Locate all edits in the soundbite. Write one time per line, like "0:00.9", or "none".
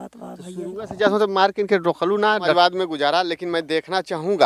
0:02.5